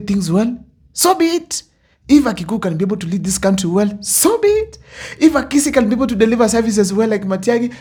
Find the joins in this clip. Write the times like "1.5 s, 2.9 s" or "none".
none